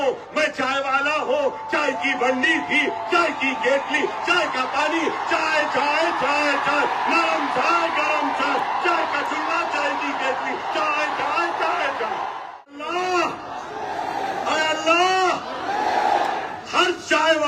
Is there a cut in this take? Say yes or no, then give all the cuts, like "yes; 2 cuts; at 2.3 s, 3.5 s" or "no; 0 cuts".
yes; 1 cut; at 12.7 s